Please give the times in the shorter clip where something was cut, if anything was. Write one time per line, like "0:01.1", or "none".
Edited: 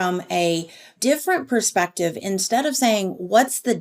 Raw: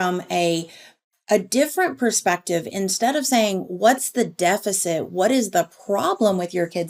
0:01.0